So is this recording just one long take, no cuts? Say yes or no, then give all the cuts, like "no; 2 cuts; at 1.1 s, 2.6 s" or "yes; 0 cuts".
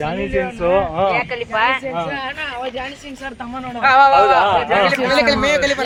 yes; 0 cuts